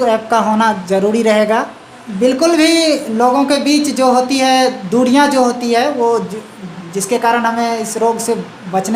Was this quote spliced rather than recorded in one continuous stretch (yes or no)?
yes